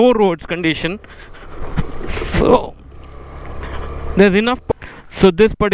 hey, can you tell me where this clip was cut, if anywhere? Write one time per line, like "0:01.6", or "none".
0:04.6